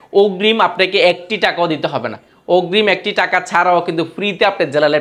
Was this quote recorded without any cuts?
yes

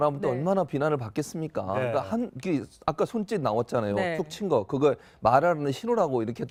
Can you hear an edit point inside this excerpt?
no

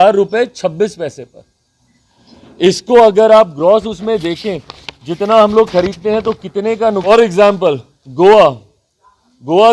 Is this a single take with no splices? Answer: no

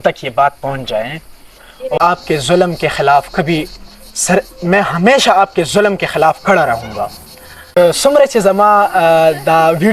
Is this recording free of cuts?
no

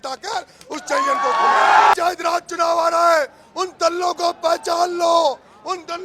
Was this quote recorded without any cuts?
no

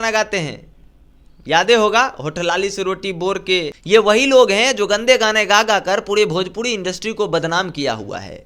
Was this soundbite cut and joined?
yes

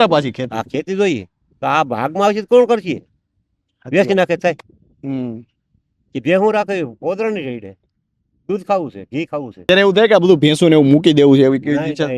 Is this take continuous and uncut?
no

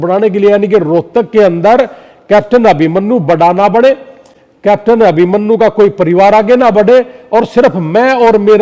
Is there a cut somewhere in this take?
no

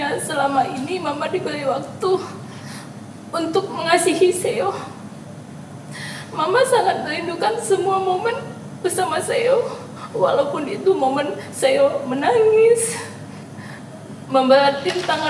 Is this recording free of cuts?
yes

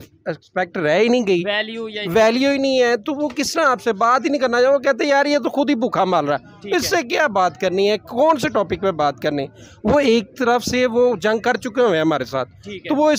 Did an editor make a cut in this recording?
no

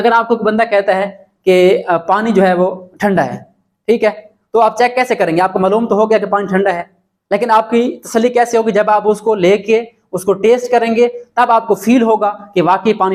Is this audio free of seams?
yes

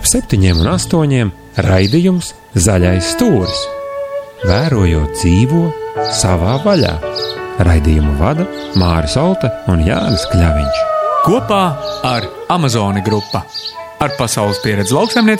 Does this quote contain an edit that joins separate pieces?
no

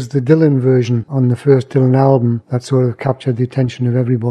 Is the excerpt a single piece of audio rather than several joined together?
yes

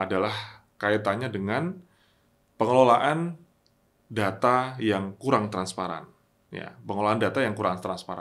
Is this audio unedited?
yes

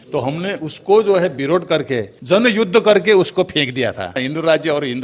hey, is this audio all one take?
no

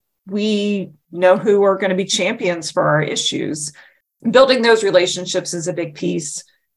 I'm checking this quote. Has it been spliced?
yes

